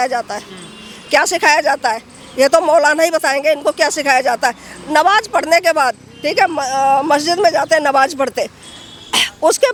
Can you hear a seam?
no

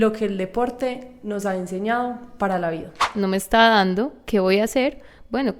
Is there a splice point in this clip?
yes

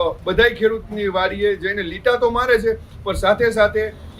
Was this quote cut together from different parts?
no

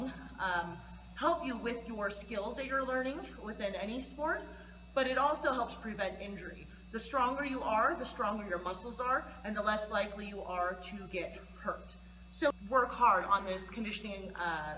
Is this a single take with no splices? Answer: no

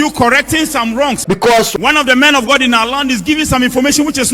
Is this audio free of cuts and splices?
no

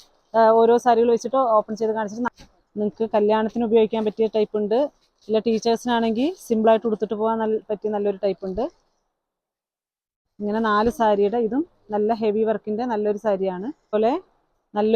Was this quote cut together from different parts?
yes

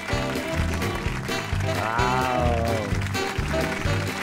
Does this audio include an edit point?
no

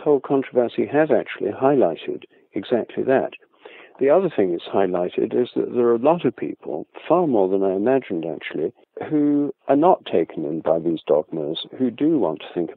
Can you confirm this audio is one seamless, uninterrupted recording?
yes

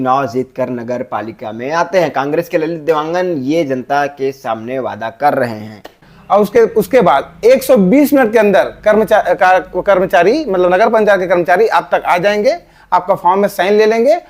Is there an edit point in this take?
yes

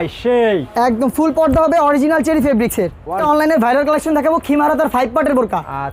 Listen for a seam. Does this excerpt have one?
yes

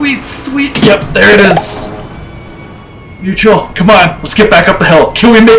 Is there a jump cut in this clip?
no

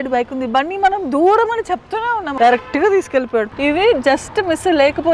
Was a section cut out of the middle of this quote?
yes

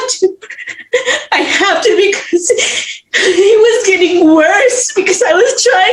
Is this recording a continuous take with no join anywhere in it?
yes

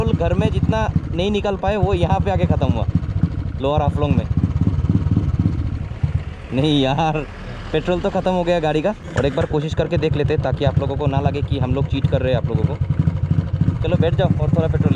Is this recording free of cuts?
yes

